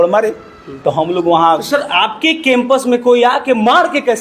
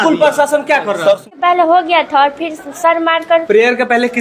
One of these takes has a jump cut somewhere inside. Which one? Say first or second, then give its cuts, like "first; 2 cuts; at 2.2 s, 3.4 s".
second; 1 cut; at 1.3 s